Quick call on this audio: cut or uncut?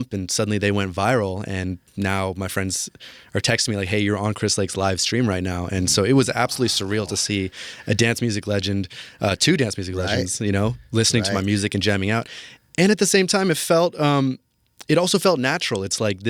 uncut